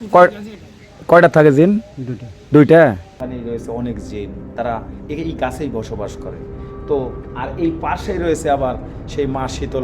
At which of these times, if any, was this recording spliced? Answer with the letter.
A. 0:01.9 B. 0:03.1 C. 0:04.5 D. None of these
B